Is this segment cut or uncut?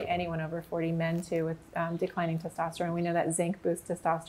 uncut